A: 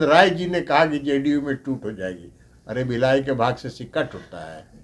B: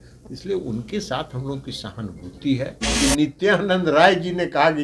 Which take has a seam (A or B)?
B